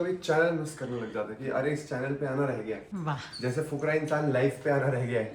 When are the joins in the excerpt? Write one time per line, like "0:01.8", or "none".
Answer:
0:02.9